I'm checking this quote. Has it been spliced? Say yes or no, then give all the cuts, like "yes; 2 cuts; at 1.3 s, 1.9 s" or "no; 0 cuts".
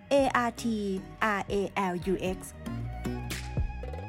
yes; 1 cut; at 2.5 s